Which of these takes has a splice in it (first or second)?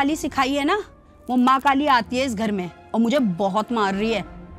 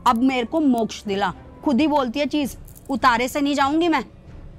second